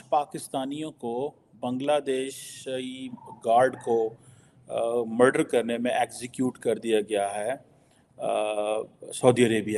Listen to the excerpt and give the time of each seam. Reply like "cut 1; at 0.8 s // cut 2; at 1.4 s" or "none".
none